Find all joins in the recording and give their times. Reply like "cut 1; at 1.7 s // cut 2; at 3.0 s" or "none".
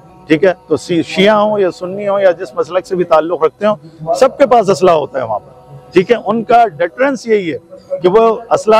none